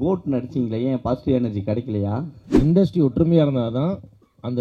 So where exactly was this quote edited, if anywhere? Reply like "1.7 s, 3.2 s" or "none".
2.4 s